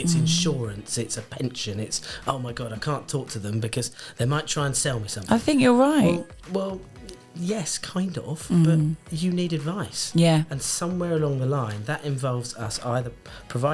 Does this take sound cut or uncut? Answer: uncut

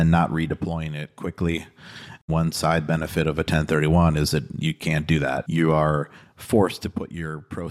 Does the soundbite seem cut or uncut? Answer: cut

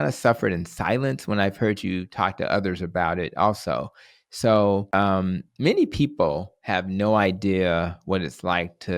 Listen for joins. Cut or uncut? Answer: cut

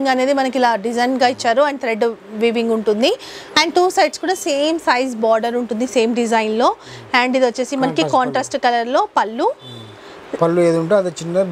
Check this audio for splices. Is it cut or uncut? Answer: uncut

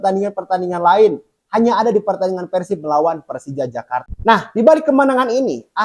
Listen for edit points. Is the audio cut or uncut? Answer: cut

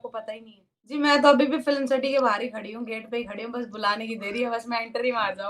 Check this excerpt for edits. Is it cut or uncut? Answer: cut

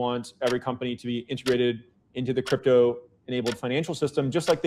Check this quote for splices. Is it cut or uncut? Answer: uncut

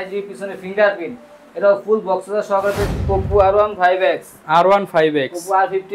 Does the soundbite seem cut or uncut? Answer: cut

